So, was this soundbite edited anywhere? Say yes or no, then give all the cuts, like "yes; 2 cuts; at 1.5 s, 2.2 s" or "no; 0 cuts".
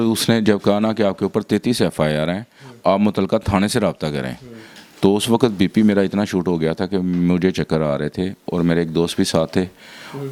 no; 0 cuts